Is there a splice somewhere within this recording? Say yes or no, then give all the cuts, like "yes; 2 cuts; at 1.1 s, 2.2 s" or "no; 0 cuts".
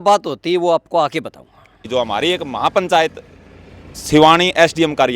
yes; 1 cut; at 1.7 s